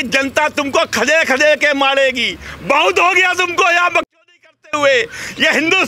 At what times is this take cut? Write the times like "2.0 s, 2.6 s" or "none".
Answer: none